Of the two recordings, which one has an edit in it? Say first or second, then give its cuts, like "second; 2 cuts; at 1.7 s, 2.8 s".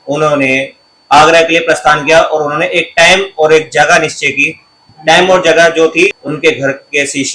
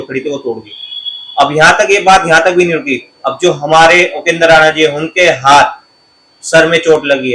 first; 1 cut; at 6.2 s